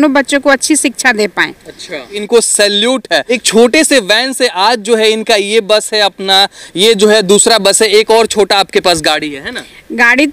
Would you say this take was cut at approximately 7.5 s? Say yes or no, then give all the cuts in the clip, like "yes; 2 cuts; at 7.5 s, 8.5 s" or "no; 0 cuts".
no; 2 cuts; at 2.2 s, 3.4 s